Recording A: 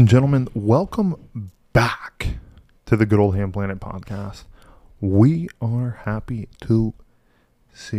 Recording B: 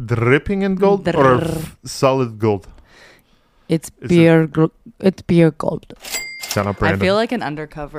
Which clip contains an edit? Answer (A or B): B